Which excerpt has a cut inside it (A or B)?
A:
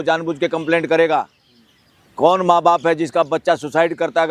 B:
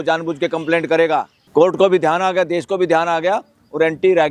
B